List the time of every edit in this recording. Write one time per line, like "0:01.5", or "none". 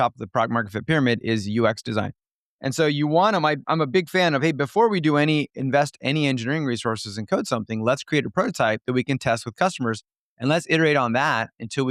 none